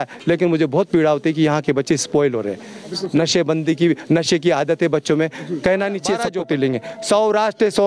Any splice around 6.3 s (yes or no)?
yes